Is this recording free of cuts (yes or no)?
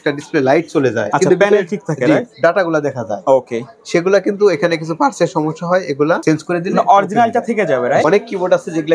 no